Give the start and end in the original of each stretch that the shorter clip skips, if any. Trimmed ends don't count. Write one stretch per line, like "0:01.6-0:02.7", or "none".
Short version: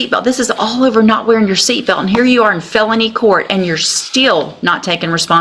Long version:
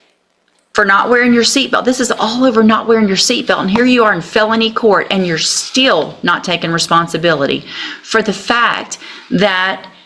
none